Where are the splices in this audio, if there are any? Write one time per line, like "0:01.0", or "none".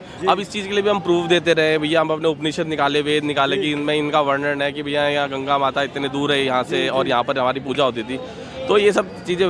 none